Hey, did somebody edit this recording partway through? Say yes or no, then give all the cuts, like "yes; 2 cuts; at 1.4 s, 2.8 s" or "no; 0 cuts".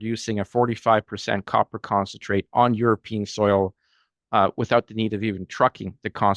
no; 0 cuts